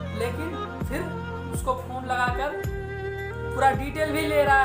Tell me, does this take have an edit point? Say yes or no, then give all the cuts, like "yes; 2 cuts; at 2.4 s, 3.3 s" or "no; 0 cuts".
no; 0 cuts